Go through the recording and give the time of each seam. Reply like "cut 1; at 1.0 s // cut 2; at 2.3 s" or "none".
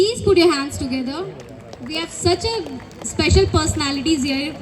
none